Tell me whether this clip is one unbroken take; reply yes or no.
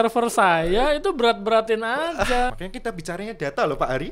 no